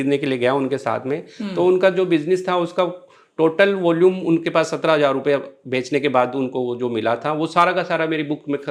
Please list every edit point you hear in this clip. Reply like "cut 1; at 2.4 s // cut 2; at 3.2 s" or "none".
none